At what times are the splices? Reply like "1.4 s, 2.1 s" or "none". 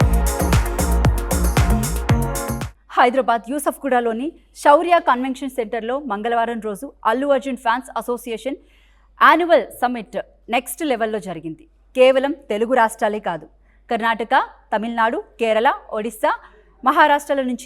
2.3 s